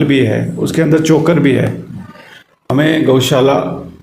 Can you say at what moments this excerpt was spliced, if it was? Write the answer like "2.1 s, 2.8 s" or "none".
2.6 s